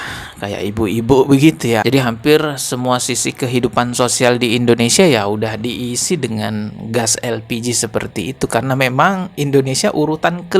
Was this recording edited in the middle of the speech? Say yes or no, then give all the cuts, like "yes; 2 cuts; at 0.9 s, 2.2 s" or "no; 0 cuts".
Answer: yes; 1 cut; at 1.8 s